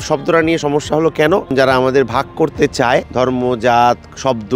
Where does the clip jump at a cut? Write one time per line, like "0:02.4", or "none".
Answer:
0:01.5
0:03.1

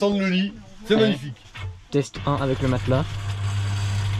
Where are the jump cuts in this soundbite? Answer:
none

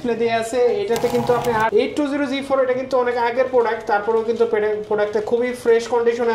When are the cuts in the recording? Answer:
0:01.7

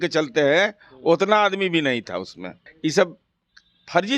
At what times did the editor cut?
0:02.6

